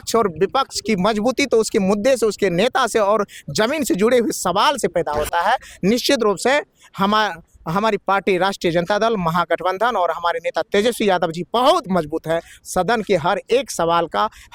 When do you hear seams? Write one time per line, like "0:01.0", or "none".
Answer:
none